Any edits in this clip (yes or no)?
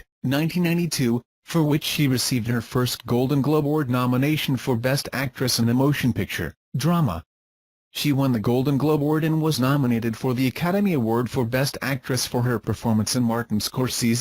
yes